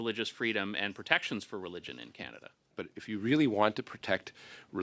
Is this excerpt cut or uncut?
cut